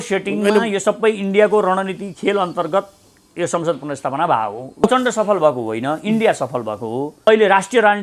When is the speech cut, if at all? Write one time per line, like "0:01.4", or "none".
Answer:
0:04.8
0:07.2